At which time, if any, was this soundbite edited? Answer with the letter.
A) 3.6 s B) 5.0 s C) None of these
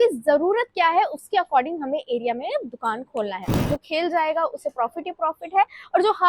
A